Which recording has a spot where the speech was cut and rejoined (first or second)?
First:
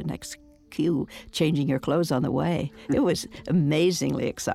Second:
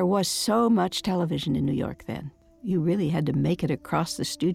second